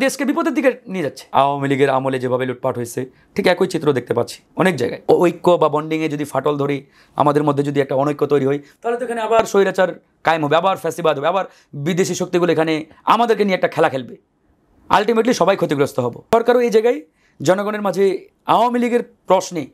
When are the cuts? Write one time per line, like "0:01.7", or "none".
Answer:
0:01.2
0:05.0
0:16.3